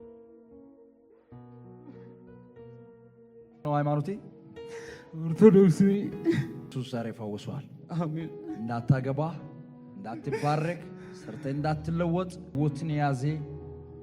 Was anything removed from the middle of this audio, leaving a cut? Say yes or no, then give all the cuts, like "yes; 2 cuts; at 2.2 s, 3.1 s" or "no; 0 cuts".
yes; 3 cuts; at 3.6 s, 6.7 s, 12.5 s